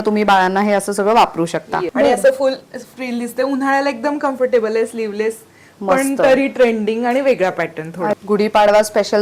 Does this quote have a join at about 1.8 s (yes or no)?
yes